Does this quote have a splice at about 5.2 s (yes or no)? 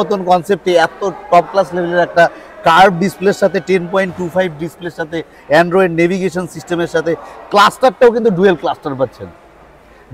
no